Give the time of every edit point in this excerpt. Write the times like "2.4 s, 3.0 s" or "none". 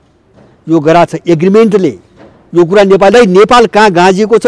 3.1 s